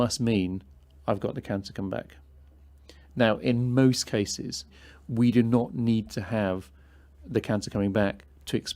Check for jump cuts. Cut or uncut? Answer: uncut